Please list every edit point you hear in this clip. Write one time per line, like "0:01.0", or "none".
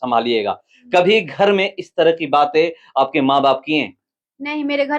none